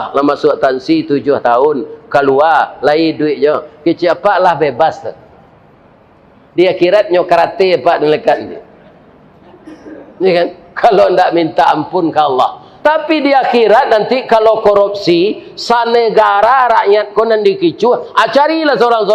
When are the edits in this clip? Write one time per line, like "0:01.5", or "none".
0:12.6